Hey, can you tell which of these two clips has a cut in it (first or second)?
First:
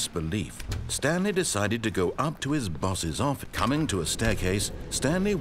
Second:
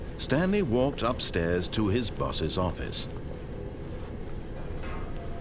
first